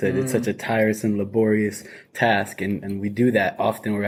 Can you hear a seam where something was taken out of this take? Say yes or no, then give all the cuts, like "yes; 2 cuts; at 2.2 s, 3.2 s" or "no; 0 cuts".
no; 0 cuts